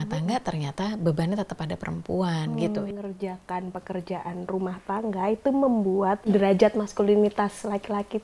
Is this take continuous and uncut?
no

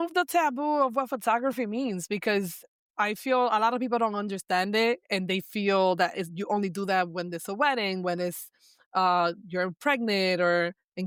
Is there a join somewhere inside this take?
no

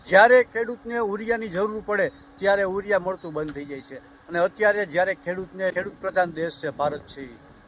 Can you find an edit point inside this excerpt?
yes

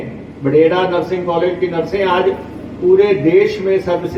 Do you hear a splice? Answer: no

